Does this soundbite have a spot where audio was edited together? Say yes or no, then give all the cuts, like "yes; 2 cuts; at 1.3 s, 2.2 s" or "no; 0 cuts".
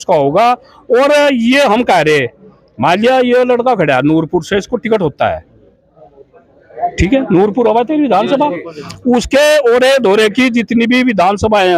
no; 0 cuts